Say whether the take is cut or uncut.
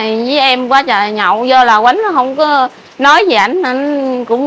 uncut